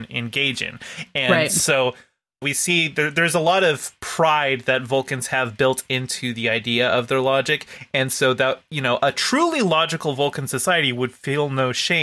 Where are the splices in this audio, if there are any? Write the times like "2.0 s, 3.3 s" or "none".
2.4 s